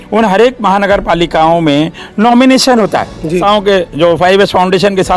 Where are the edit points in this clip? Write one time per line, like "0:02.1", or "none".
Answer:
0:03.4

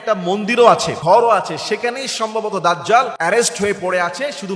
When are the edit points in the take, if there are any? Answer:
0:00.9
0:03.1

